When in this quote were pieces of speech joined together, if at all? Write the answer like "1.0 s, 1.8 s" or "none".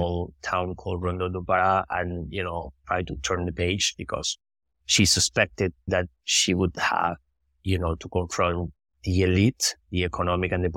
2.8 s, 5.9 s